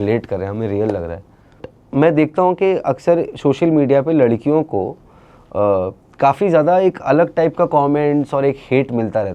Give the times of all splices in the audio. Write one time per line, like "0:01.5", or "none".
0:01.8

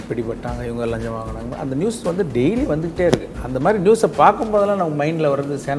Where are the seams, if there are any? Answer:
none

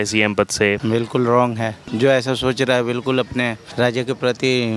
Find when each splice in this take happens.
0:00.8
0:01.8
0:03.6

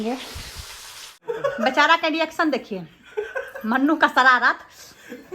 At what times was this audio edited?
0:01.2

